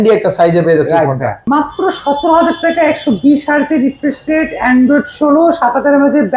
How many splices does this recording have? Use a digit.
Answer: 1